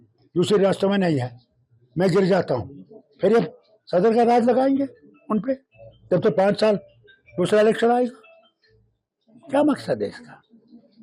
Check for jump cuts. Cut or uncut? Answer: uncut